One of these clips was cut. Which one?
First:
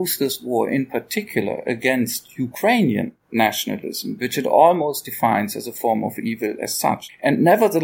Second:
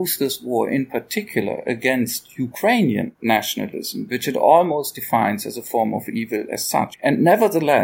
second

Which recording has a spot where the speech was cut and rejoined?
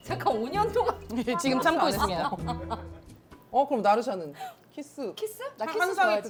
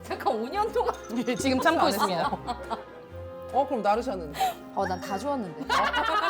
second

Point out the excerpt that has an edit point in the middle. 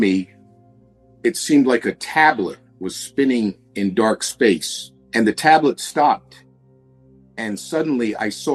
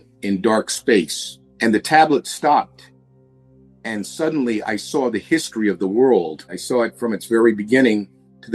second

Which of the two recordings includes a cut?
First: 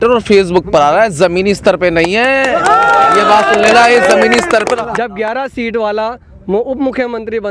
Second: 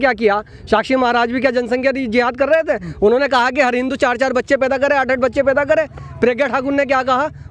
first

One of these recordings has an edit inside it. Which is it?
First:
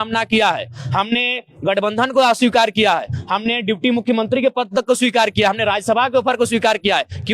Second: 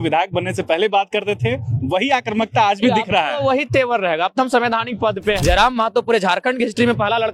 second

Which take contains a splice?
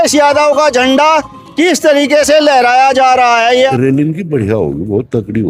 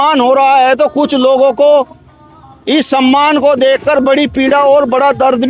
first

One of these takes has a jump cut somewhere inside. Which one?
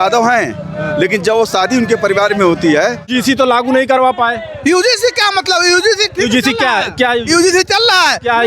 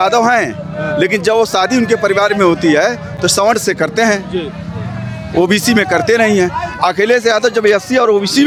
first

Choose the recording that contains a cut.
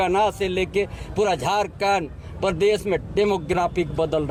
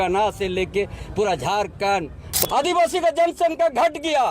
second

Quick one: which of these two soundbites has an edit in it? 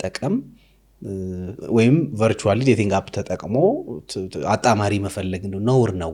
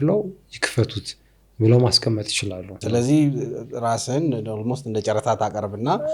second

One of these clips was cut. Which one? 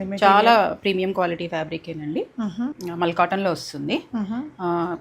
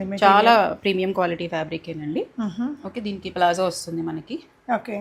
first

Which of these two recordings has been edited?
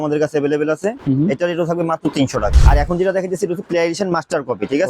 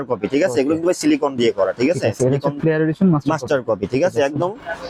first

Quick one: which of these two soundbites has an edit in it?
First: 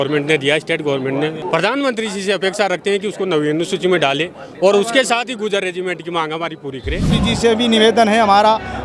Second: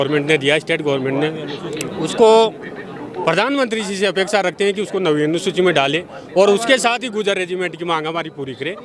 first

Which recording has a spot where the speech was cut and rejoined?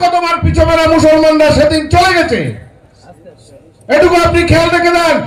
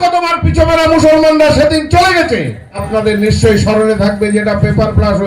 second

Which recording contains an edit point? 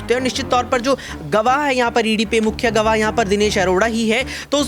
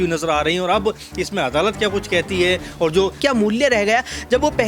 second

